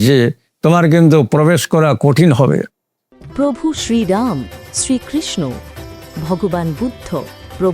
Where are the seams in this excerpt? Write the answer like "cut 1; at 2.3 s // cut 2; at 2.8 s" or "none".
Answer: cut 1; at 3.2 s